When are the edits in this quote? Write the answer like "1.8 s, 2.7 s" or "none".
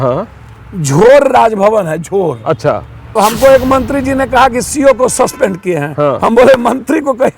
3.1 s